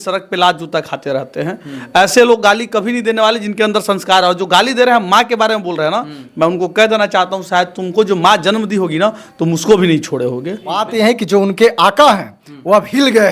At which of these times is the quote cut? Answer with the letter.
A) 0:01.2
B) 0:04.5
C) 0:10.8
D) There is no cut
C